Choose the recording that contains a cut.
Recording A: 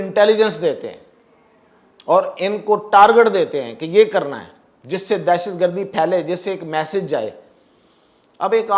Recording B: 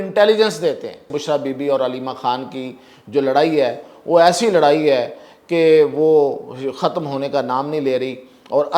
B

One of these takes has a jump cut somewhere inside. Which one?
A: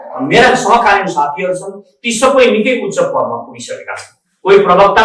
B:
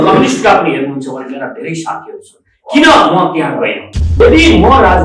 B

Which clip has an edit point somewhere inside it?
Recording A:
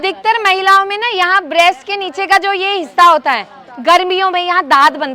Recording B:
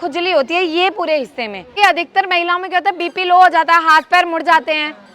B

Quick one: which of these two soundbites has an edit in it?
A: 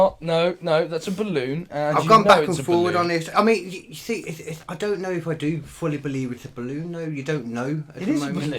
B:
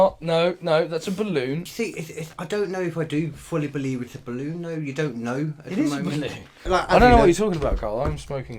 B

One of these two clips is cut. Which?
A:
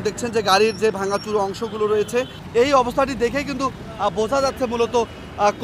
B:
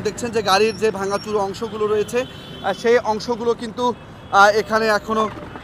A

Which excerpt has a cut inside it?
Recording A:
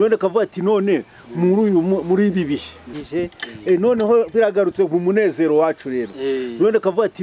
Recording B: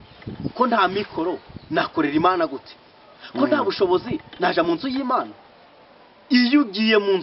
A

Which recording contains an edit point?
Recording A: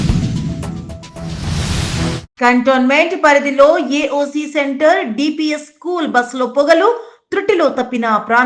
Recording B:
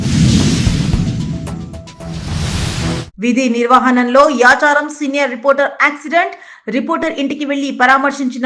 A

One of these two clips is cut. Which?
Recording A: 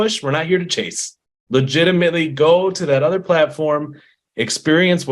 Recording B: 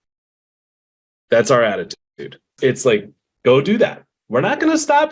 B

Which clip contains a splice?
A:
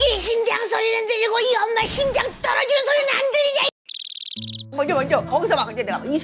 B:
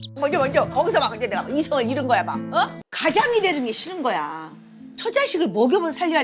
B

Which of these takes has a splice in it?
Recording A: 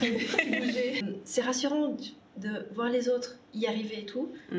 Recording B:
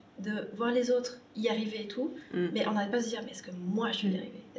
A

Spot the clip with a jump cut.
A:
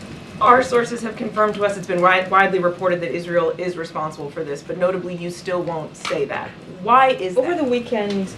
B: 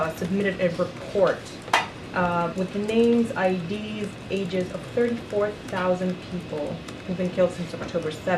A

